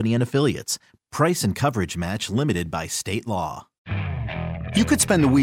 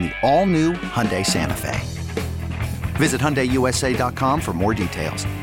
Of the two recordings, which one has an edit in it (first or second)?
first